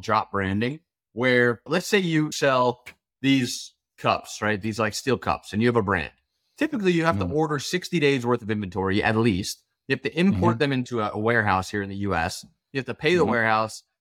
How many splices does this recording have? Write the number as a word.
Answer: one